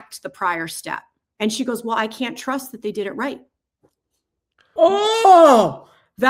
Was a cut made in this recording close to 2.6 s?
no; 2 cuts; at 1.2 s, 4.7 s

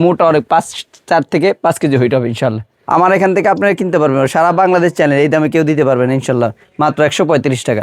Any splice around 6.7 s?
no; 1 cut; at 2.7 s

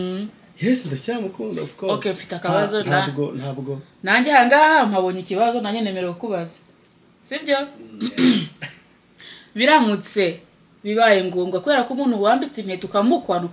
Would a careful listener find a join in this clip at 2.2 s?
no; 0 cuts

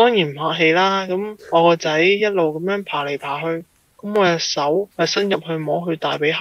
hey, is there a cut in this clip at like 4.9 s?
yes; 2 cuts; at 1.3 s, 4.9 s

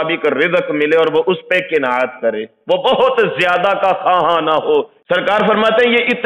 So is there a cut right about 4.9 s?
yes; 1 cut; at 4.9 s

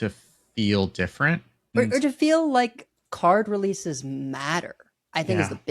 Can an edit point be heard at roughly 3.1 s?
no; 1 cut; at 1.7 s

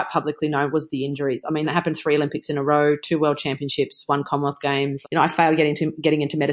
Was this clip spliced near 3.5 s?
no; 2 cuts; at 1.7 s, 5.0 s

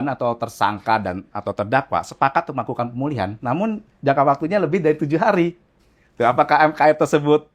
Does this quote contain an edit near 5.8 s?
no; 0 cuts

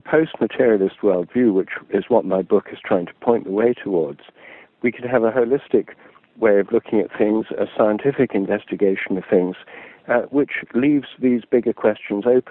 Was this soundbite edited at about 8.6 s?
no; 0 cuts

